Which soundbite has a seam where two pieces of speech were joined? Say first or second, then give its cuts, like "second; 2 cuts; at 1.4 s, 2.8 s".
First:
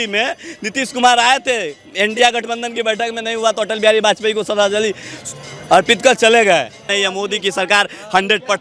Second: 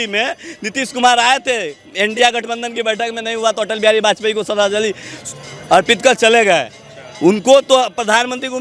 first; 1 cut; at 6.9 s